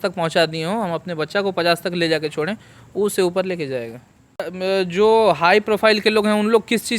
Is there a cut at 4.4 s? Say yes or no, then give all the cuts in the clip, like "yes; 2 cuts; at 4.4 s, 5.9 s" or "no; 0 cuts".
yes; 1 cut; at 4.4 s